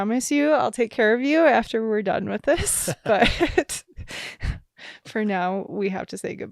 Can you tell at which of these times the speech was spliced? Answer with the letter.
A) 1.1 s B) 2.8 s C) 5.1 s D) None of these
D